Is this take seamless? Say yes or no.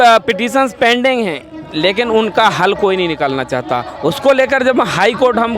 yes